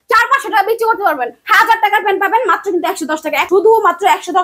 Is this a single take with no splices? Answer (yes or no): no